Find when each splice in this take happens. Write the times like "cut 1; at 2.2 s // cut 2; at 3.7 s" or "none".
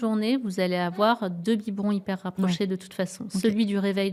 none